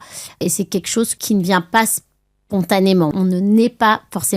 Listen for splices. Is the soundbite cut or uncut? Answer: cut